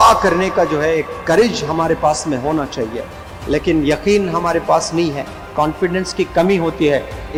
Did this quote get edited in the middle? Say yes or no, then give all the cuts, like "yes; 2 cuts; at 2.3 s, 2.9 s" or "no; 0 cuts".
no; 0 cuts